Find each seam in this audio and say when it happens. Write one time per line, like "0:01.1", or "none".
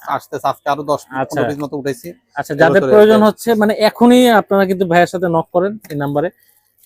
none